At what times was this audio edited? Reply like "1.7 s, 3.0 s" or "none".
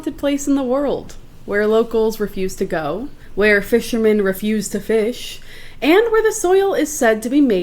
3.2 s

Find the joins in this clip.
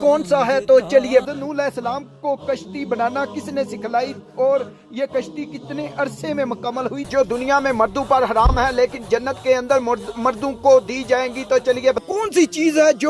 1.2 s, 7.1 s, 12.0 s

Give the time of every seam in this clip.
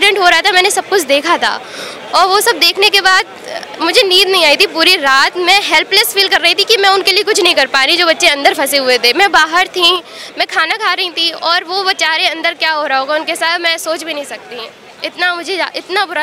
none

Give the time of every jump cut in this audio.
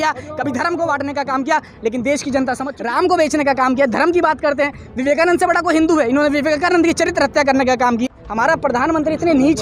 2.7 s, 8.0 s

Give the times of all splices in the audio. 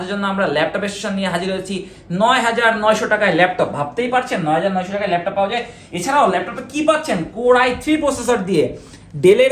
none

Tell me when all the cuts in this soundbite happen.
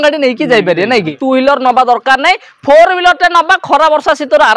1.2 s

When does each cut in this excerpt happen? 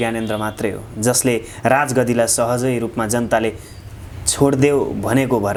none

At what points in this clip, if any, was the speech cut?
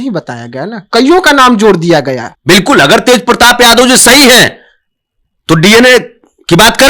2.3 s

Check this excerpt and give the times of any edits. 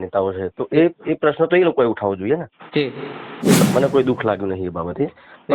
3.6 s

